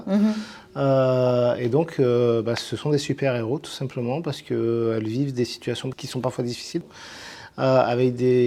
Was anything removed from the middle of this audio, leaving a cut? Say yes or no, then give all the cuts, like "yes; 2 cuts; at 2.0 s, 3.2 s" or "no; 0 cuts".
no; 0 cuts